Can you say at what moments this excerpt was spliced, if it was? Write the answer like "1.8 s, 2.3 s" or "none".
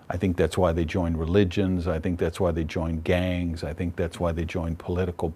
none